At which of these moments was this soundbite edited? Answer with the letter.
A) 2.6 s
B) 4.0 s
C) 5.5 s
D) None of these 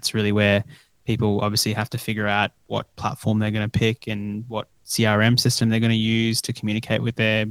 A